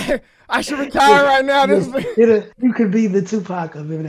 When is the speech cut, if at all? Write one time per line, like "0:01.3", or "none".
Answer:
0:02.5